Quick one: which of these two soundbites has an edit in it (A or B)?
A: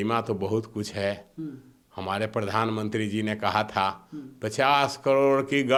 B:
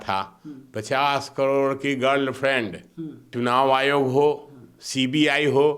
B